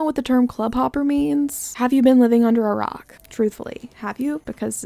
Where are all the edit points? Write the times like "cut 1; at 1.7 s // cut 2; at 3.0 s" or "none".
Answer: none

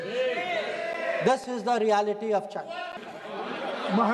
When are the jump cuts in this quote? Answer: cut 1; at 3.0 s

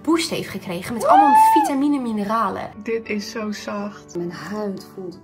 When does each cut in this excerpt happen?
cut 1; at 2.6 s

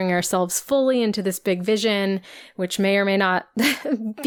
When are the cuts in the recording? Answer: none

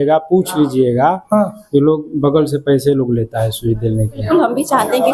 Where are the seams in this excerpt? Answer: cut 1; at 4.2 s

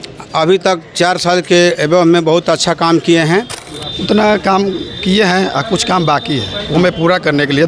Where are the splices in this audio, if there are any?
cut 1; at 3.6 s

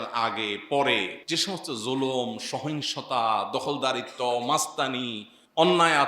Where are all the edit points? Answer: cut 1; at 1.2 s

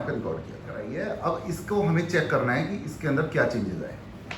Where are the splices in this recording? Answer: cut 1; at 0.9 s

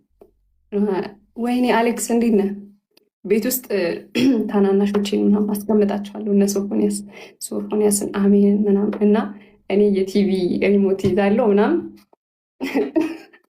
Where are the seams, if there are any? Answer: none

